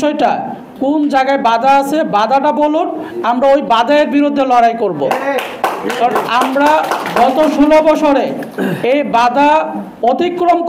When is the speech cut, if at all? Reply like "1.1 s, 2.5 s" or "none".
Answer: none